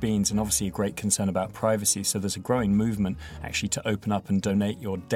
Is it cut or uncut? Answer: uncut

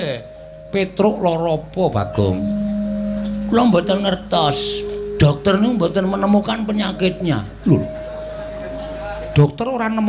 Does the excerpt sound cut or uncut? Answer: uncut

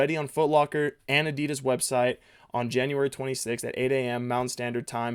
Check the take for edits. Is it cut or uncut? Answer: uncut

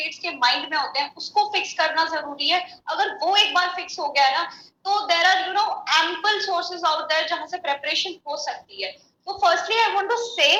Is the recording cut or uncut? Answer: uncut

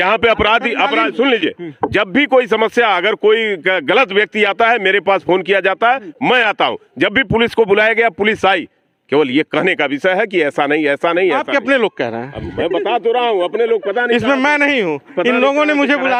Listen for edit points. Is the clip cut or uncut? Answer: uncut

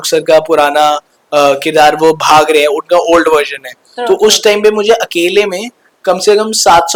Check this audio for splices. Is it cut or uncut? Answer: uncut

